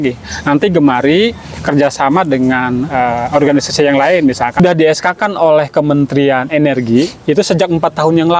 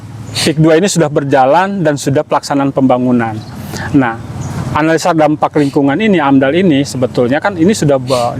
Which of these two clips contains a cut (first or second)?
first